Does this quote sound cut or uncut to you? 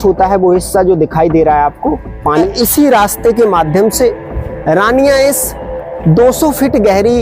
cut